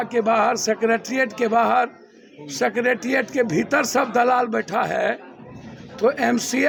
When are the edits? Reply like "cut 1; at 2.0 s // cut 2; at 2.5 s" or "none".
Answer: none